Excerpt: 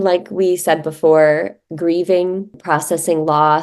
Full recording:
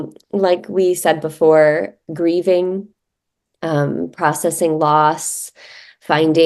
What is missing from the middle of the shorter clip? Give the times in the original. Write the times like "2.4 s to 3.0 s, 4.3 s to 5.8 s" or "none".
2.9 s to 4.1 s